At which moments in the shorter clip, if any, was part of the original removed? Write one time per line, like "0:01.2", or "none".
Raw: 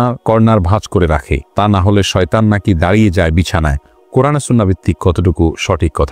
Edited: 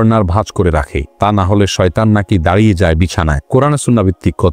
0:03.4